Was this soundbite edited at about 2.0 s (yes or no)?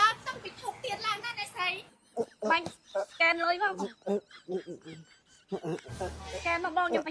yes